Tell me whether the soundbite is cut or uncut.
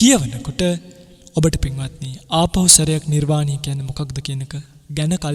uncut